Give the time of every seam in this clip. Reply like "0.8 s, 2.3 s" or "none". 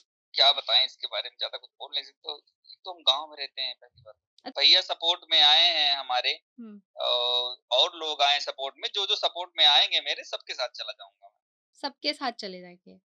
4.5 s